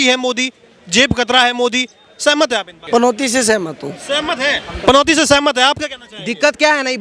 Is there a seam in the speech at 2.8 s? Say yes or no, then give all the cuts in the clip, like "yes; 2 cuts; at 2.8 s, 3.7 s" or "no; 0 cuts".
yes; 1 cut; at 2.8 s